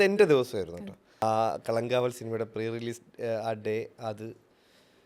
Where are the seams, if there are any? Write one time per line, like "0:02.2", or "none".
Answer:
0:01.2